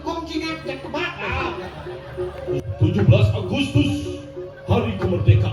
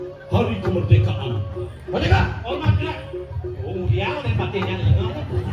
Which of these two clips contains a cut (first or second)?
first